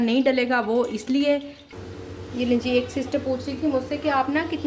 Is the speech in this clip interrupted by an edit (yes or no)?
yes